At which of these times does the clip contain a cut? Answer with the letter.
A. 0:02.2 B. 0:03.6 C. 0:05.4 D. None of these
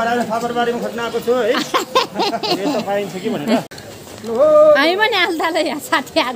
B